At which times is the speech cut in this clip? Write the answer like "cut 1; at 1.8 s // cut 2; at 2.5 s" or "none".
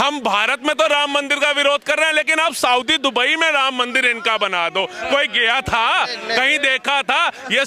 none

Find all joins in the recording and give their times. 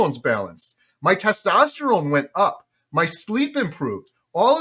none

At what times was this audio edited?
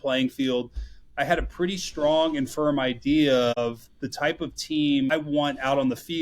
cut 1; at 3.5 s // cut 2; at 5.1 s

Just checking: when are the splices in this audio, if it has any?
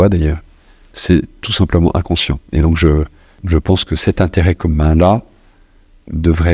cut 1; at 2.3 s

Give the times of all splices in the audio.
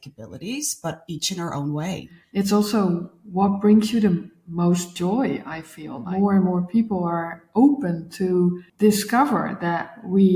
cut 1; at 2.1 s // cut 2; at 6.0 s // cut 3; at 8.7 s

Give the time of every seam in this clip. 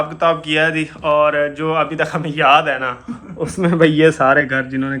none

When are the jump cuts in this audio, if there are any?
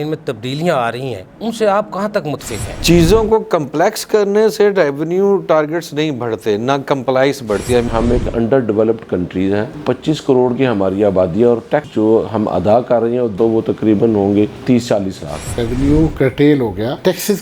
cut 1; at 2.7 s // cut 2; at 7.9 s // cut 3; at 13.3 s // cut 4; at 15.6 s

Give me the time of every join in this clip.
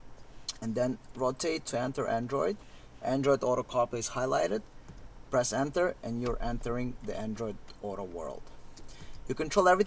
none

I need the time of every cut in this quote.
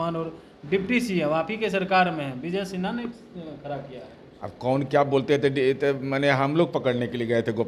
none

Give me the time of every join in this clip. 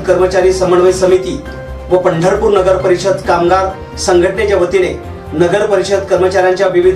none

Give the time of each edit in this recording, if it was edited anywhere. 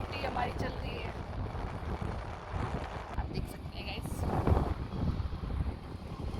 none

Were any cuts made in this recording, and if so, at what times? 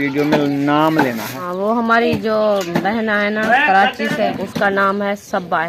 cut 1; at 1.5 s // cut 2; at 4.3 s

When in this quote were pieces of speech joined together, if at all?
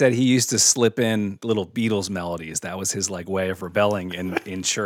cut 1; at 1.4 s

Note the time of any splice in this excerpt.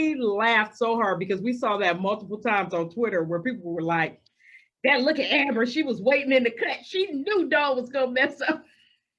none

